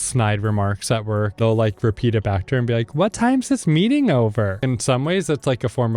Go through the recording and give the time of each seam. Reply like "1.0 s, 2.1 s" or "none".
1.4 s, 4.6 s